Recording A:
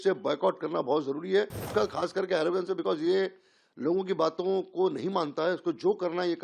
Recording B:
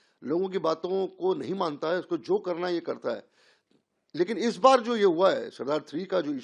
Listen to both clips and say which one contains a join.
A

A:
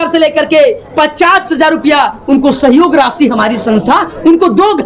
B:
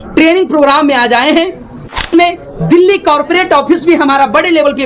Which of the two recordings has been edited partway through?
B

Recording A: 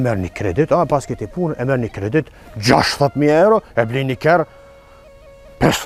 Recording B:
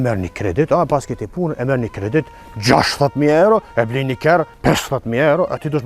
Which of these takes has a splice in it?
B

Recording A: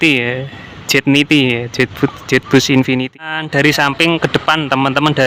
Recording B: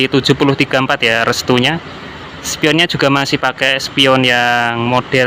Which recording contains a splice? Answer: A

